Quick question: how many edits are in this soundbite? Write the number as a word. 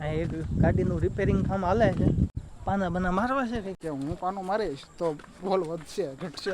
two